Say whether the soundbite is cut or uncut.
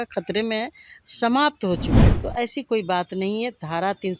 cut